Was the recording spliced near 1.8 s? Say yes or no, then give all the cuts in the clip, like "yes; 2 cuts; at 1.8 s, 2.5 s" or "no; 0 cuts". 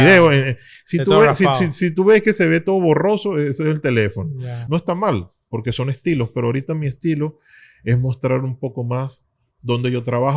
no; 1 cut; at 4.5 s